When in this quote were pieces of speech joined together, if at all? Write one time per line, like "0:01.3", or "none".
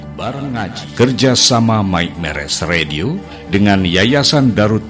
0:00.9